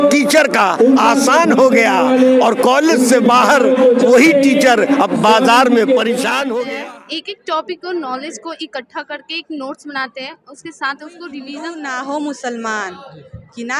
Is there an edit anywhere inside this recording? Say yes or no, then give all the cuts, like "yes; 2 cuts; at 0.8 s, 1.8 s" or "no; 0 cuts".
yes; 2 cuts; at 6.7 s, 11.5 s